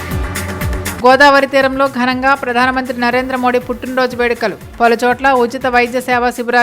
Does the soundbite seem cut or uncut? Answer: cut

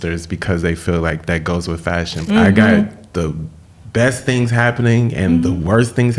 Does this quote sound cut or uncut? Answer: cut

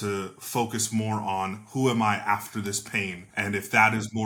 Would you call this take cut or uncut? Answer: cut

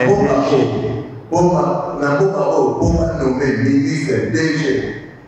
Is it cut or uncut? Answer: uncut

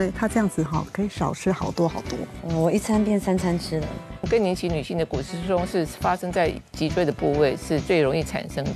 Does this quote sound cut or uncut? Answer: cut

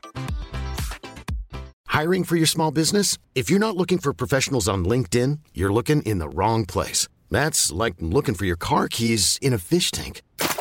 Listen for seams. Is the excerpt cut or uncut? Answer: cut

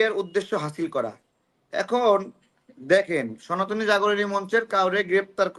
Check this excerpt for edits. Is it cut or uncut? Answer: uncut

